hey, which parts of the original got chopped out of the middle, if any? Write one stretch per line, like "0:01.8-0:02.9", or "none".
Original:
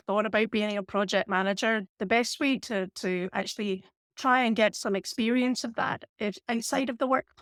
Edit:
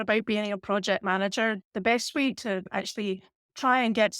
0:02.9-0:03.3

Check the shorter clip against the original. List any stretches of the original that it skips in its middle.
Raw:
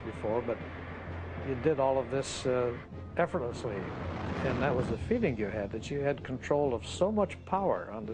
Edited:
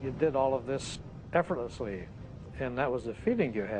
0:02.4-0:02.8

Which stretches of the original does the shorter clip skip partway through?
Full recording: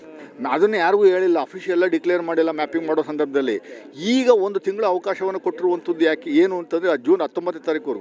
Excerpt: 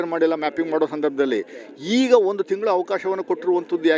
none

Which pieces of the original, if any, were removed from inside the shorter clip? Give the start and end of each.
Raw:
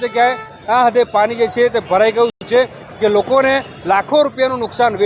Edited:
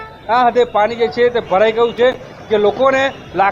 0:02.5-0:02.6

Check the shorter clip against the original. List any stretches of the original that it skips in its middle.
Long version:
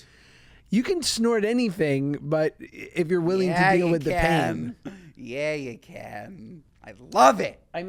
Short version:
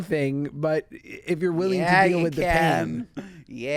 none

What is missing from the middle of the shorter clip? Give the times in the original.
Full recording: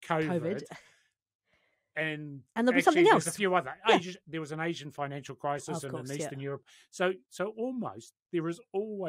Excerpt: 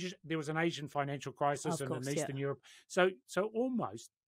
none

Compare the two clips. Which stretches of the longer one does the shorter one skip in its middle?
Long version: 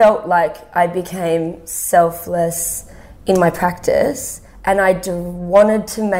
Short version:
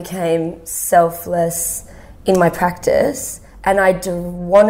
none

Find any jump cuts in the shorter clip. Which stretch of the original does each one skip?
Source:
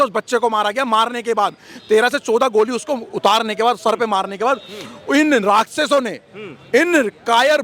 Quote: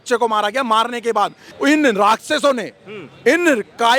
0:01.7-0:04.9

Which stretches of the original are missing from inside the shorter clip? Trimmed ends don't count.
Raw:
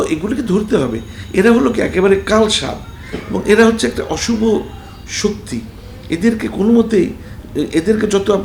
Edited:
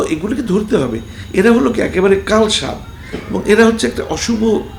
none

